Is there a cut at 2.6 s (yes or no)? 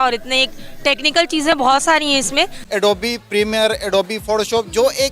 yes